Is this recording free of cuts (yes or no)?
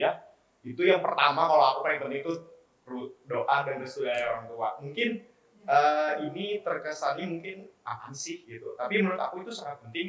yes